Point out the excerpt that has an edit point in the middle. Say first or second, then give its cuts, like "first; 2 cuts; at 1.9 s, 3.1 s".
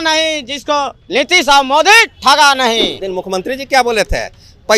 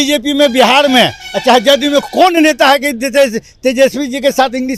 first; 1 cut; at 3.0 s